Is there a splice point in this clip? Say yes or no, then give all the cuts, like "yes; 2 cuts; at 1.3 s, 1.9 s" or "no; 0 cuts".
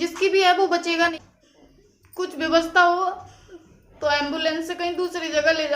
yes; 1 cut; at 1.1 s